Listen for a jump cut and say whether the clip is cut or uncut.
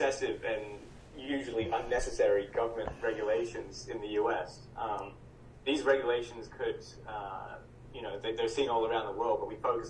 uncut